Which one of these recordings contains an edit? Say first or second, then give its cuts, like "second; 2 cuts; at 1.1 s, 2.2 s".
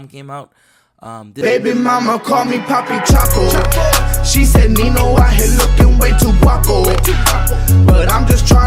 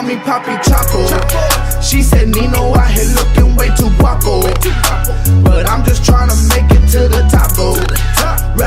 first; 1 cut; at 1.4 s